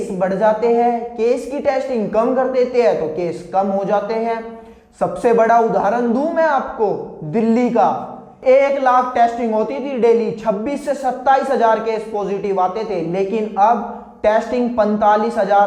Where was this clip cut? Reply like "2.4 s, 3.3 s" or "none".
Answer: none